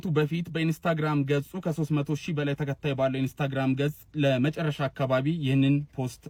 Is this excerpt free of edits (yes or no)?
yes